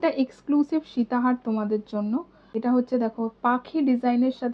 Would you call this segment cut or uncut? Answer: cut